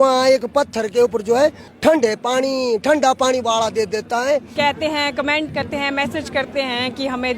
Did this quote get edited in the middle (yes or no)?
yes